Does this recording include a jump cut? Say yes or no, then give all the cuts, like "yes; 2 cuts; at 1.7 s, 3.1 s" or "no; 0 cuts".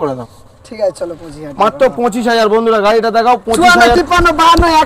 yes; 1 cut; at 3.6 s